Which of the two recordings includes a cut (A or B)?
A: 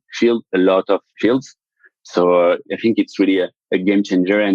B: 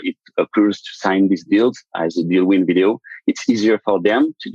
A